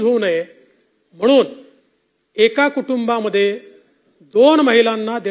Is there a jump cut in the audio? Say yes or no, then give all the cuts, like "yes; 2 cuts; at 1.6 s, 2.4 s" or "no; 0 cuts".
no; 0 cuts